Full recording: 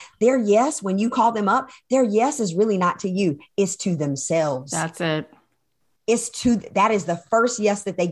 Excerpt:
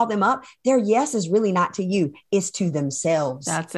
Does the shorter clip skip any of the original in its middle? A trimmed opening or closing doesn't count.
no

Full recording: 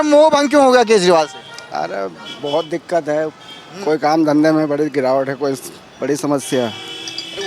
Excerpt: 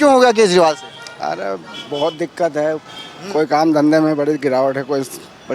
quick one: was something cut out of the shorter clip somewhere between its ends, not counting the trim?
no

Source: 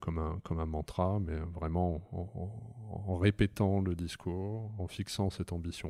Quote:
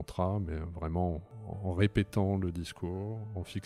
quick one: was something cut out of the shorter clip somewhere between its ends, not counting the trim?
yes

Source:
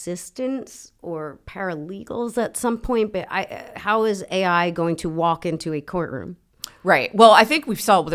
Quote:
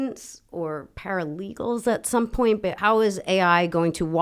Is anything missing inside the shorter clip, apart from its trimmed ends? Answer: yes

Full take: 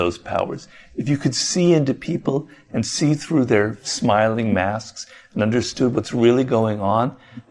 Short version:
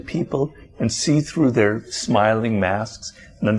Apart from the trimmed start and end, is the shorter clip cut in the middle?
no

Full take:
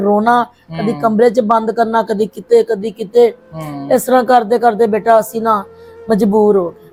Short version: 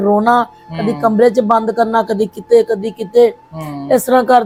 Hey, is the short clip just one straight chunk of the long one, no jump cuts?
yes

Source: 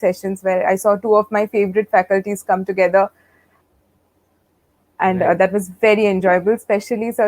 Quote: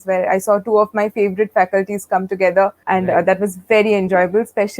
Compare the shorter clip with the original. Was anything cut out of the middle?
yes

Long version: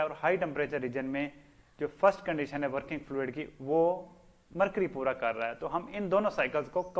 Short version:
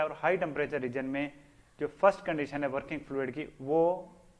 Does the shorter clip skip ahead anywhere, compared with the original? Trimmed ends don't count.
no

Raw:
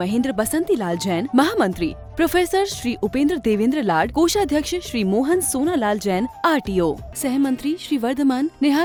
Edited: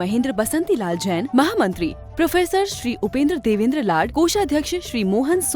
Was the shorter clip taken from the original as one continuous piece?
yes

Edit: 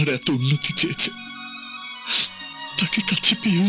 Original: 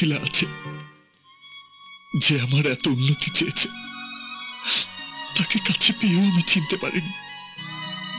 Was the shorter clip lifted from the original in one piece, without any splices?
yes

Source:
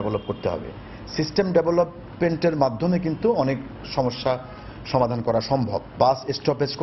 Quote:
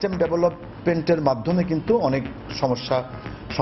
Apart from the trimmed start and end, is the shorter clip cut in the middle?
no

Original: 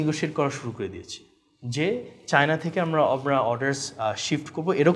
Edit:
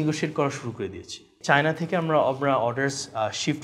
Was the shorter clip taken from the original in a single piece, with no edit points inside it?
no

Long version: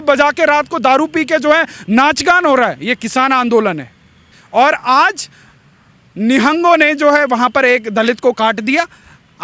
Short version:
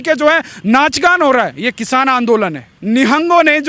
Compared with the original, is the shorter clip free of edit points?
no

